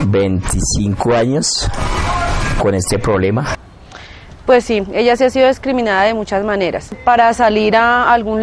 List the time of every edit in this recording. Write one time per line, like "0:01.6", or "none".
0:03.5
0:06.9